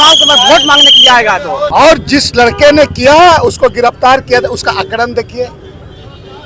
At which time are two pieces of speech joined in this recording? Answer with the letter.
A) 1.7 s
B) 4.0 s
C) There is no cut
A